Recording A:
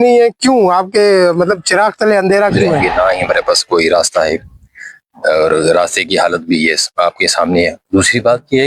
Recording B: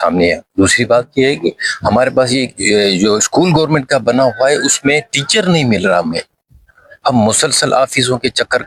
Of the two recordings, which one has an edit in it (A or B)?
A